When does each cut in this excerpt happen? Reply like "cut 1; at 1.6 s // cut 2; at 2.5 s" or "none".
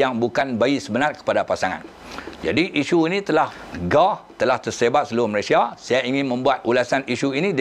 cut 1; at 3.6 s // cut 2; at 6.6 s